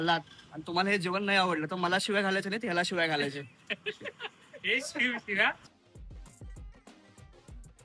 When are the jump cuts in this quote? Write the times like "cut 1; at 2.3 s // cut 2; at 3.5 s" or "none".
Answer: cut 1; at 5.6 s